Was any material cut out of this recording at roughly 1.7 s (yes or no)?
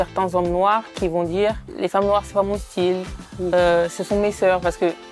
yes